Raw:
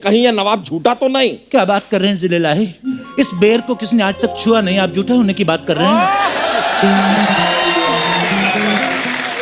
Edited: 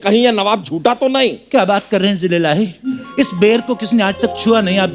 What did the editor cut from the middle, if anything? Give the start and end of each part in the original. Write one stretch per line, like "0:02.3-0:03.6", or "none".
none

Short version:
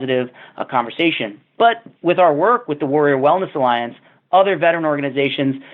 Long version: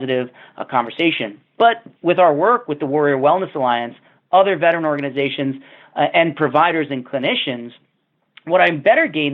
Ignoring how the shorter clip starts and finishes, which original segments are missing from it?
none

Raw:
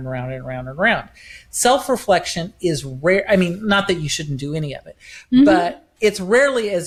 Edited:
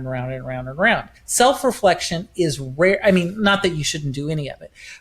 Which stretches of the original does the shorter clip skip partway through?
0:01.2-0:01.4

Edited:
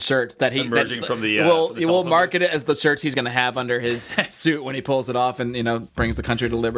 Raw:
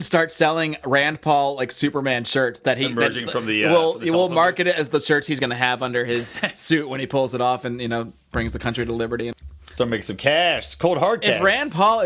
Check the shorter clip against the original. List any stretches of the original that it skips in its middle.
0:08.1-0:08.2

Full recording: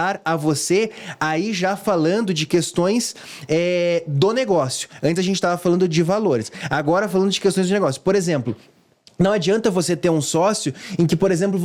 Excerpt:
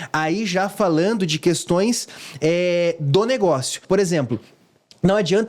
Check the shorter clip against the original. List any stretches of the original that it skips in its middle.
0:04.9-0:08.0

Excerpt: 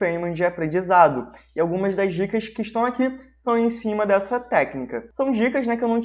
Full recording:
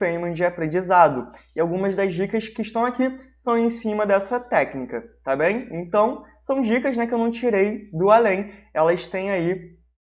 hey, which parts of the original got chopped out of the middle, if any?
0:05.0-0:06.3

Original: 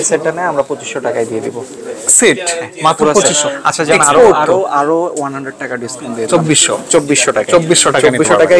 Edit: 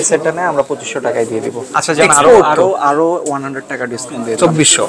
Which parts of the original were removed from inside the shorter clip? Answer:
0:01.7-0:03.6

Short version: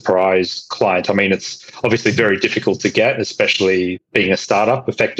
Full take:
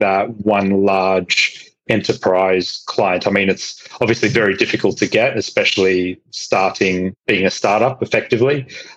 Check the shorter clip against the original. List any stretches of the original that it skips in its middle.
0:06.2-0:07.2

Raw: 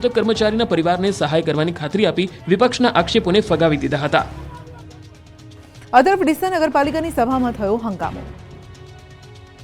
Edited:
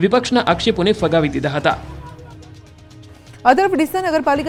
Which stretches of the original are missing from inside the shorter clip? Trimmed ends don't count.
none

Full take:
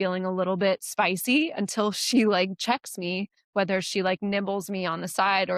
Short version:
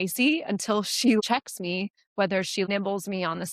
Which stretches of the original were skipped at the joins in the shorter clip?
0:02.3-0:02.6
0:04.0-0:04.3

